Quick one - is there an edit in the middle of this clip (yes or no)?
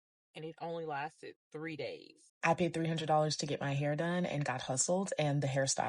yes